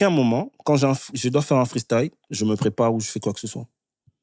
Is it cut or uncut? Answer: uncut